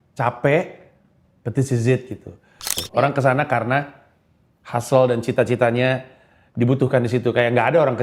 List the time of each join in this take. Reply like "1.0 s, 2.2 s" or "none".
2.8 s